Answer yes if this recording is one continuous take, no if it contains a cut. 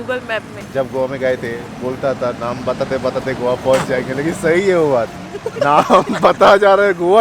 yes